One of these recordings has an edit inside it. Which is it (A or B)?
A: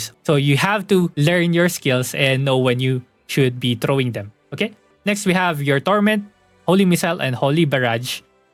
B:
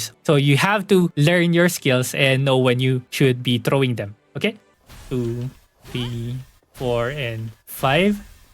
B